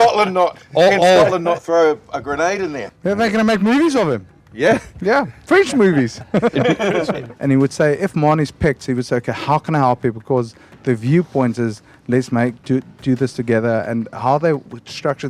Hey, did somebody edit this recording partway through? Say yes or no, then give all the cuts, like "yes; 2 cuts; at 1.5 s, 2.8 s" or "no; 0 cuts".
yes; 2 cuts; at 2.8 s, 7.2 s